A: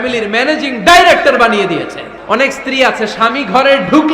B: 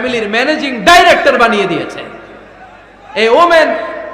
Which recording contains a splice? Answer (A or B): A